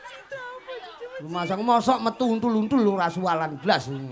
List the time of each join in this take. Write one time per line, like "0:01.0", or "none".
none

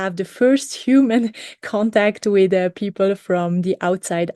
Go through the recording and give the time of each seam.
none

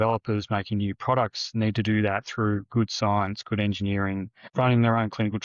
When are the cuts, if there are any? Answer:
0:04.4

